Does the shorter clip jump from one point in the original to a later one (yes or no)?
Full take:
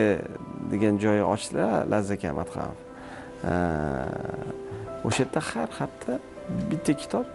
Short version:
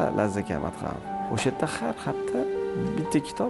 yes